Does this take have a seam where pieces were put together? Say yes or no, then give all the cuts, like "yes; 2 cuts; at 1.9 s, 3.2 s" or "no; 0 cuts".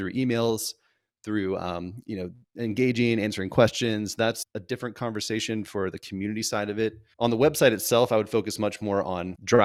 no; 0 cuts